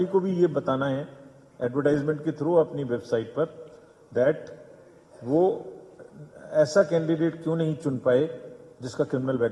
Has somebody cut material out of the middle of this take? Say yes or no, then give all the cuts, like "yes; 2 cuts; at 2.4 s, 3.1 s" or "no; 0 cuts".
no; 0 cuts